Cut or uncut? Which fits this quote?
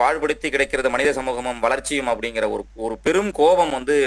uncut